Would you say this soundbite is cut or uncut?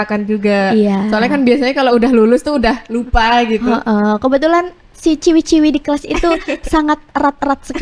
uncut